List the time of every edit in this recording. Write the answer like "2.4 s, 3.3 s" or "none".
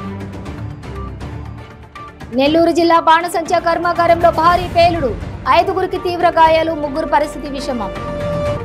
2.3 s